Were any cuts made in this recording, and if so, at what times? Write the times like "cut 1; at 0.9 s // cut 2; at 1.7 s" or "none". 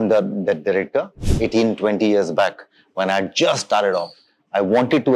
cut 1; at 1.2 s